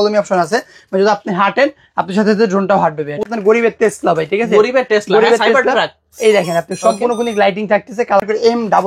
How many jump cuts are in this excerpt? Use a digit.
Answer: 2